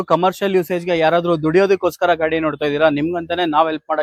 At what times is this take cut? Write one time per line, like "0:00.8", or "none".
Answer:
none